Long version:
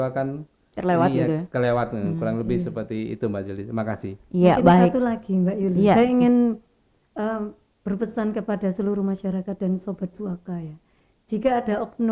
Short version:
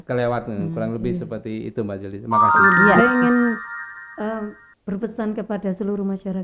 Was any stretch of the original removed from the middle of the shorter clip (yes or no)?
yes